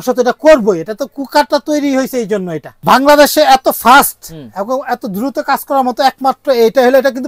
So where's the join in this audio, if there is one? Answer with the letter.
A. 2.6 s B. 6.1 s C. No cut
A